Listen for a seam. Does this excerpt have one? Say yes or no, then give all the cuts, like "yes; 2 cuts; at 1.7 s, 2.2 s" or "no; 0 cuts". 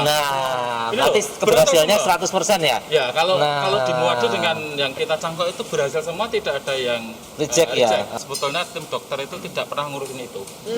yes; 1 cut; at 8.1 s